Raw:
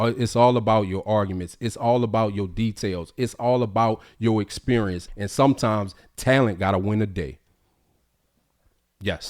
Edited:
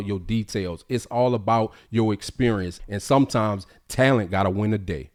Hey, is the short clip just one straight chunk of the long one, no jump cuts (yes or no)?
yes